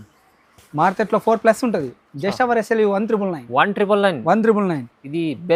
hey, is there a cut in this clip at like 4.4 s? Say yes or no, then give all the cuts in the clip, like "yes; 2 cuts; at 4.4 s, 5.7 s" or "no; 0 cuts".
no; 0 cuts